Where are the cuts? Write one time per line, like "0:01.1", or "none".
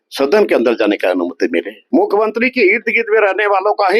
0:01.8